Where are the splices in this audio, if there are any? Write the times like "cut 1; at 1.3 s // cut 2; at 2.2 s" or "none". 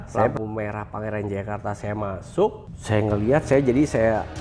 cut 1; at 2.7 s